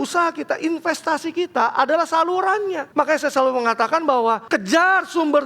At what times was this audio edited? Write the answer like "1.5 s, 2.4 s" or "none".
2.8 s, 4.4 s